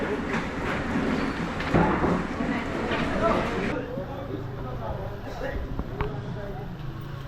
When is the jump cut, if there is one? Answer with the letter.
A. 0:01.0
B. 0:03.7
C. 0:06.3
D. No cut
B